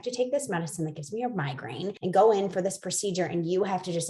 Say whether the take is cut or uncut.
cut